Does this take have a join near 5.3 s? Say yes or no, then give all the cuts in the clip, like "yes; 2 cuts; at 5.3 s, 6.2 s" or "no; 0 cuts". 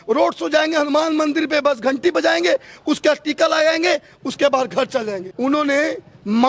yes; 1 cut; at 5.3 s